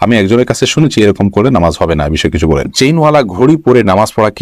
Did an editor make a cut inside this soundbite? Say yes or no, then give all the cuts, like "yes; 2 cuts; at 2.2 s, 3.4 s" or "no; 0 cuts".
yes; 1 cut; at 2.7 s